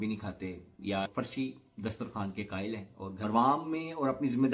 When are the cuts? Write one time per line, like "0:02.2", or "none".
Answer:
0:01.1
0:03.1